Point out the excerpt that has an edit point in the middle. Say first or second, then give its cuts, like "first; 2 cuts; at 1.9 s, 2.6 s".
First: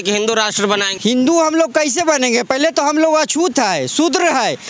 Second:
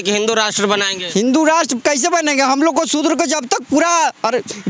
first; 1 cut; at 0.9 s